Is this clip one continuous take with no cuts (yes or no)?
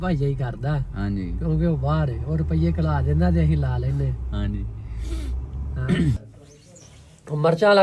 no